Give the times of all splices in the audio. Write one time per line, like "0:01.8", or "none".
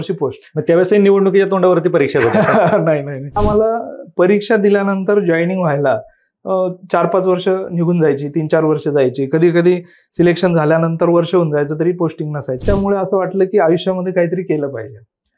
0:03.4
0:12.6